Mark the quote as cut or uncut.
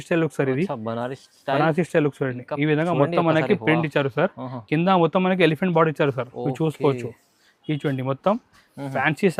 uncut